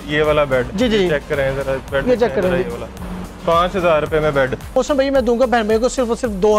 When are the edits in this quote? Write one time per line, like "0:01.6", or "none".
0:04.7

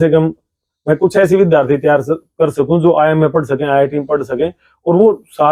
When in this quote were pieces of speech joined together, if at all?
none

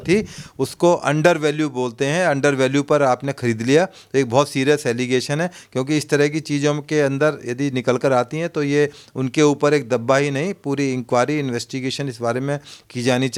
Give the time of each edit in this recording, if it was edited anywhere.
none

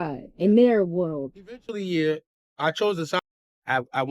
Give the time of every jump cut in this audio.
0:03.2

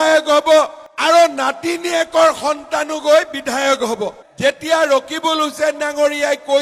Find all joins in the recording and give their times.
0:04.2

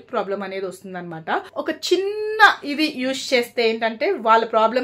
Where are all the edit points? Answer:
0:01.5

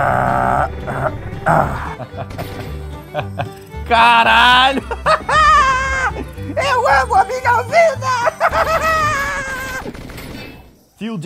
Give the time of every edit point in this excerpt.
none

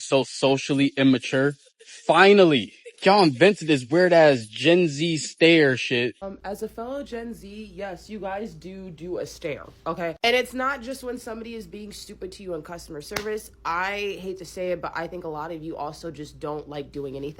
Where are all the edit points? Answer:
0:06.2

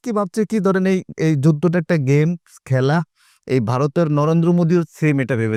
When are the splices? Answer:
none

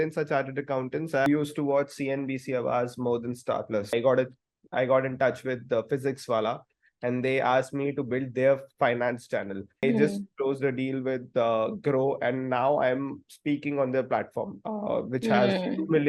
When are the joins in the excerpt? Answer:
0:01.3
0:03.9
0:09.8

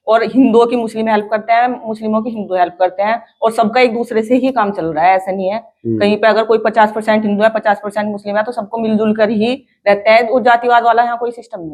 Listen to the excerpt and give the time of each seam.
none

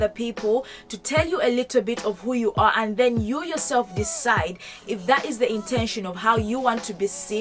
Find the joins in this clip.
none

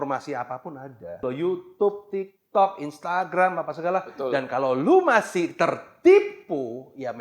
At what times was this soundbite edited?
0:01.2

